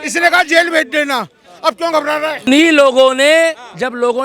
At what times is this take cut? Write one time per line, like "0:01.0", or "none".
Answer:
0:02.4